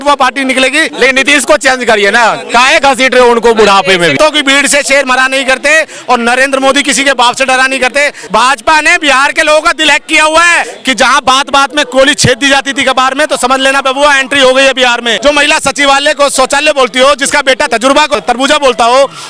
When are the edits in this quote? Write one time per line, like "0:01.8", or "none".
0:00.9
0:04.1
0:08.2
0:10.7
0:15.1
0:17.9